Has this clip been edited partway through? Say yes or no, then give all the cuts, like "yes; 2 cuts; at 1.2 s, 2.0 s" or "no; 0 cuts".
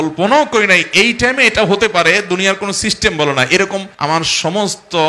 yes; 1 cut; at 3.9 s